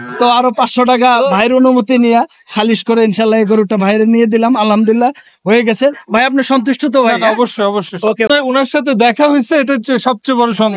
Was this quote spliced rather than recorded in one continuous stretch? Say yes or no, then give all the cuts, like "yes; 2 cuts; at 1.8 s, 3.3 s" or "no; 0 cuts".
yes; 1 cut; at 8.3 s